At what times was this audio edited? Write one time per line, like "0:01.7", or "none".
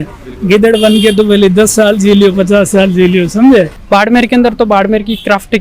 0:03.8